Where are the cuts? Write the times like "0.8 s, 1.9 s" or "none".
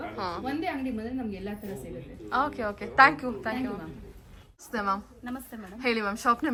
none